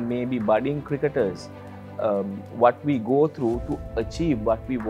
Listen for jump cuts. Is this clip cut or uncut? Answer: uncut